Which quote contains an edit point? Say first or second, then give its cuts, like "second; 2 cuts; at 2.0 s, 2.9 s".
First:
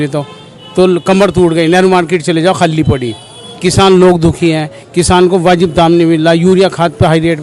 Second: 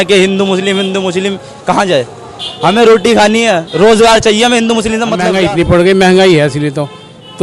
second; 1 cut; at 5.2 s